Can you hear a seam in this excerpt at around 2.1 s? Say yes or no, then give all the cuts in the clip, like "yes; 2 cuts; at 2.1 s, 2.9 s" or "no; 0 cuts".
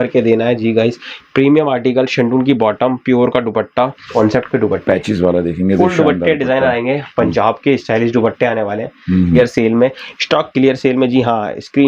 no; 2 cuts; at 4.1 s, 9.4 s